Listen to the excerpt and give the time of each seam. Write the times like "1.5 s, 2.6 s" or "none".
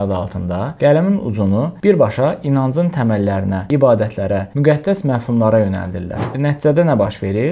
6.2 s